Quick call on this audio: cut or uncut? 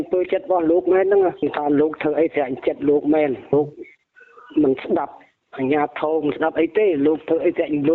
uncut